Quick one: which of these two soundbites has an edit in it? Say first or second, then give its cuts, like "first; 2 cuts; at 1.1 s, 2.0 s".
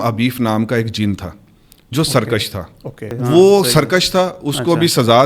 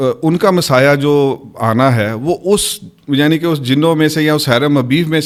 first; 1 cut; at 3.1 s